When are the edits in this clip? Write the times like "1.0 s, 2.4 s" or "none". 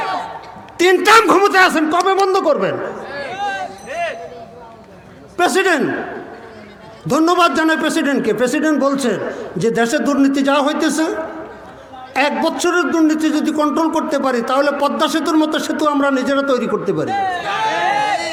none